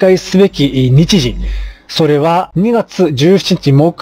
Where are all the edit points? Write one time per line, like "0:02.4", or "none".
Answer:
none